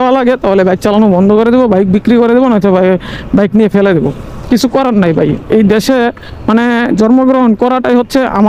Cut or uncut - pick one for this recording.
uncut